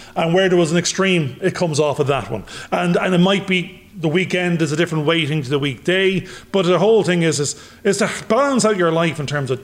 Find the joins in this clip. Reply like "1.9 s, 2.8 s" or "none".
none